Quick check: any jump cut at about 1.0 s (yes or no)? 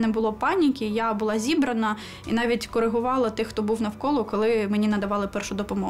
no